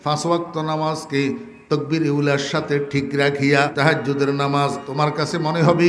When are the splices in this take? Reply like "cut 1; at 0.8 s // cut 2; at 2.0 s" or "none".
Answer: cut 1; at 3.7 s // cut 2; at 4.8 s